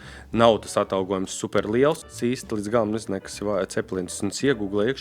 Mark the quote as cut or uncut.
cut